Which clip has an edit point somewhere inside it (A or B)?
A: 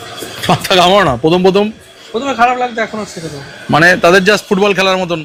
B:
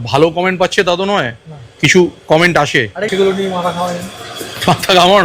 B